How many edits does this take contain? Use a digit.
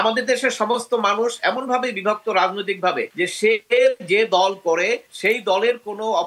2